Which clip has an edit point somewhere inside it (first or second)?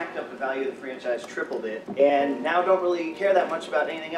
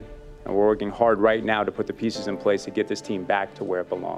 first